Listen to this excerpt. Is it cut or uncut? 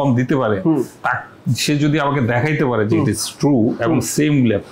uncut